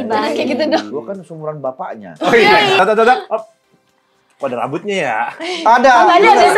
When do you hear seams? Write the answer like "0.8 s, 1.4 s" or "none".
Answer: 0.9 s, 2.8 s